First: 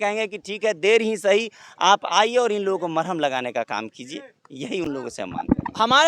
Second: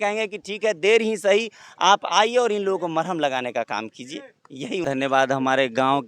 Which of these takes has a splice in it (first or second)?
second